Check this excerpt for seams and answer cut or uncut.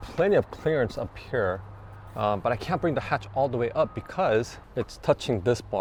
uncut